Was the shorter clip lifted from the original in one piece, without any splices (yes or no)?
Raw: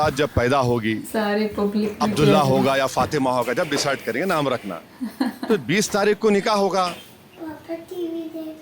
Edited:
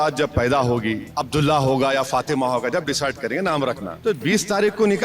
no